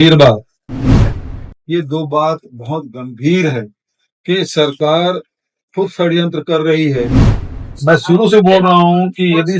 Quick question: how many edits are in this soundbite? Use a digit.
2